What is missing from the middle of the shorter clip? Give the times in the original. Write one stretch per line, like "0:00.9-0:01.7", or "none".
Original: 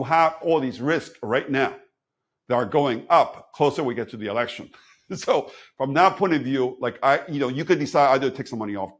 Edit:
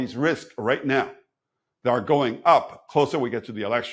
none

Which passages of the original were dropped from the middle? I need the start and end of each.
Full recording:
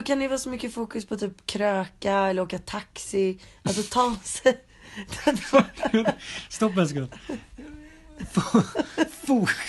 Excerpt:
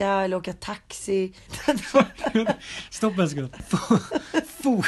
0:03.5-0:05.0
0:07.1-0:08.2

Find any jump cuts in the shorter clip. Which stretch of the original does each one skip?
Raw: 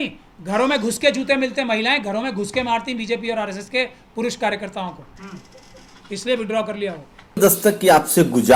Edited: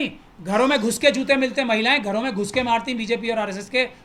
none

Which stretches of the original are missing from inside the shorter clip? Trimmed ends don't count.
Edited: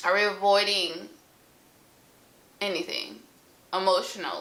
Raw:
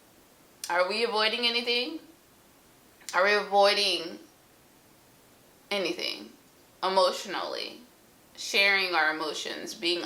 none

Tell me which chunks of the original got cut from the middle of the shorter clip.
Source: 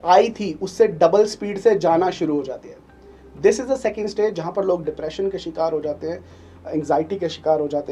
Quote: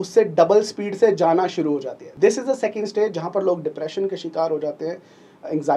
0:02.6-0:03.2

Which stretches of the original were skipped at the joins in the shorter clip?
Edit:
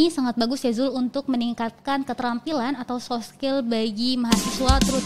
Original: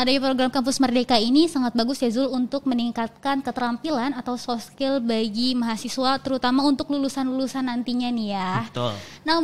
none

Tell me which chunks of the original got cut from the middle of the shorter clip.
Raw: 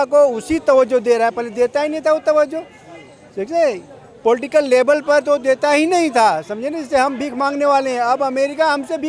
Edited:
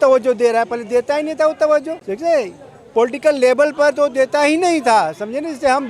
0:02.7-0:03.3

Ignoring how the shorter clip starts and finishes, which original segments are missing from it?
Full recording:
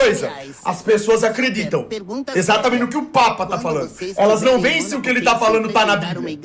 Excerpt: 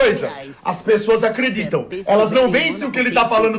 0:01.9-0:04.0

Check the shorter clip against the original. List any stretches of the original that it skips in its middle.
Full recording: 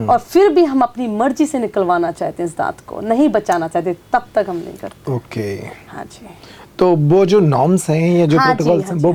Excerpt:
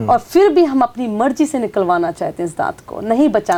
none

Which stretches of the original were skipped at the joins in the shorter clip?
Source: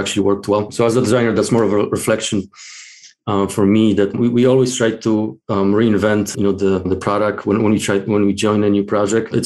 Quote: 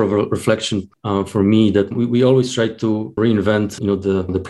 0:02.5-0:03.2
0:05.4-0:05.7

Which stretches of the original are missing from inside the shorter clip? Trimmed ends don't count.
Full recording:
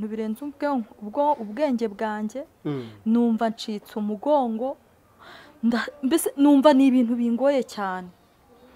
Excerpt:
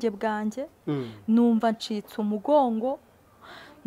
none

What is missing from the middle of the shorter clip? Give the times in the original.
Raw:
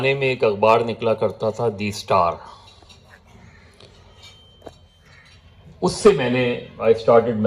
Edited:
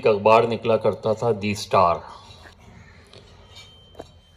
0:02.8-0:03.1

